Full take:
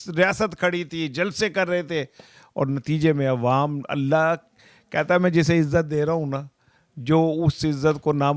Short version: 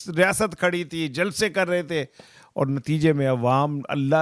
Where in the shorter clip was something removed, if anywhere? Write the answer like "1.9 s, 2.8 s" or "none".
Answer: none